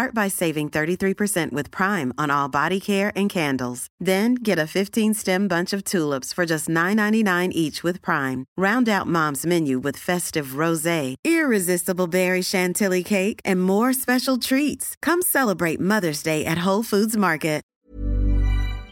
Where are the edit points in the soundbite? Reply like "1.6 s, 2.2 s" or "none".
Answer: 17.7 s